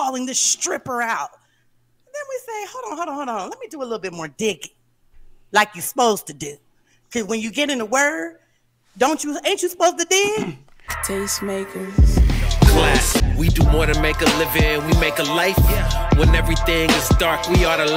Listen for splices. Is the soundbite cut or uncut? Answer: cut